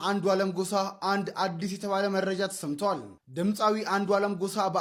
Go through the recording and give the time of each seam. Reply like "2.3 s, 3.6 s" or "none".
none